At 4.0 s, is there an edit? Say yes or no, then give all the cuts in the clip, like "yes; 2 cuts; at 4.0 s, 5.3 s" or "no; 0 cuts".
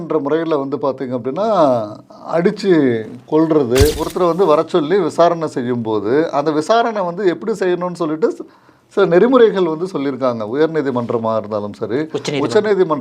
yes; 1 cut; at 4.0 s